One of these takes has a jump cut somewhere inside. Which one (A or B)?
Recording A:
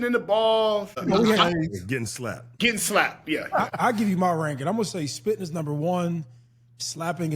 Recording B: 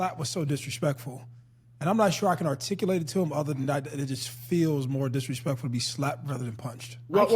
A